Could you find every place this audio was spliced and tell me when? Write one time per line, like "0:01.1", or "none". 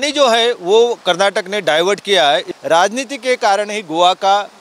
0:02.5